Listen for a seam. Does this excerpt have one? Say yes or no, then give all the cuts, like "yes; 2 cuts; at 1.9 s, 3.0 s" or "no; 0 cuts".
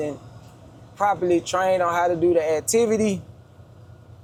no; 0 cuts